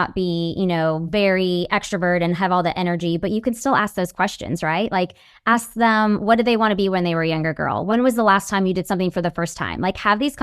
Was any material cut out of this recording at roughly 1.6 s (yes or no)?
no